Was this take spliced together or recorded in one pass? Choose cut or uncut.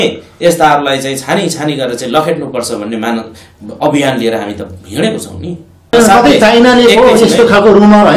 cut